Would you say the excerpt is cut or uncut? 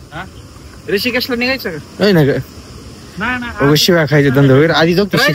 uncut